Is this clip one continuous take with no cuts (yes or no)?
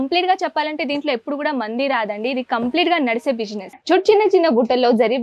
no